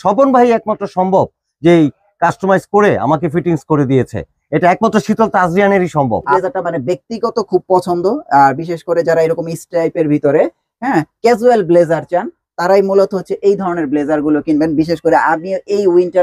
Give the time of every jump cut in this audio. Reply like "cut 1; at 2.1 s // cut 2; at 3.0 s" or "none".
cut 1; at 6.3 s